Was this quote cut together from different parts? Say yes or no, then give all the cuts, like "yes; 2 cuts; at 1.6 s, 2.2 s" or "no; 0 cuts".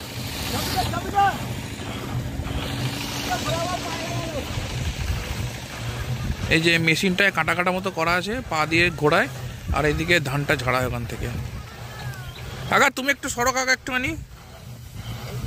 no; 0 cuts